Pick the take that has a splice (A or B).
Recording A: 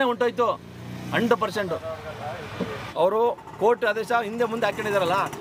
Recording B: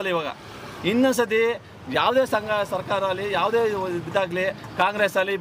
A